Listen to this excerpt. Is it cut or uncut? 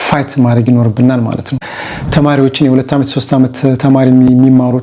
cut